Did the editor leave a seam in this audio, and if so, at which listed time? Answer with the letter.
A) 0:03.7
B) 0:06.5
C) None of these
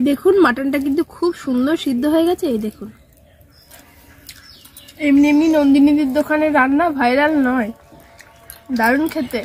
A